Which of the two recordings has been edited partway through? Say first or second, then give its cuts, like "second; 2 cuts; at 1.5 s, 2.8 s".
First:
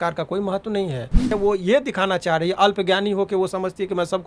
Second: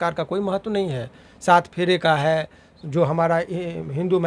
first; 1 cut; at 1.3 s